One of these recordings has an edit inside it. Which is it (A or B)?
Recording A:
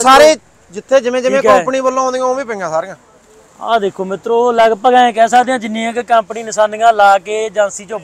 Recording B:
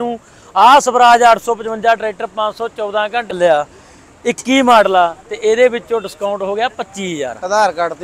B